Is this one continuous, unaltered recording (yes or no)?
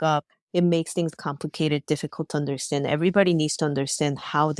yes